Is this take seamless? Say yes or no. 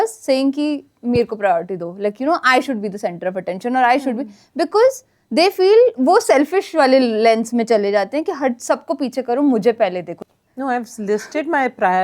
no